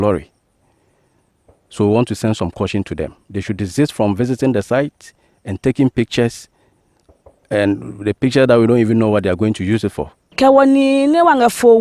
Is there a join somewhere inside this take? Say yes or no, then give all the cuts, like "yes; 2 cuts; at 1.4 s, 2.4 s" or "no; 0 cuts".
yes; 1 cut; at 10.2 s